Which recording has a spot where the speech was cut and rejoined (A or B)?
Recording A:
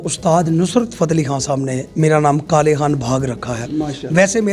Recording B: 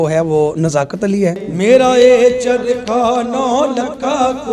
B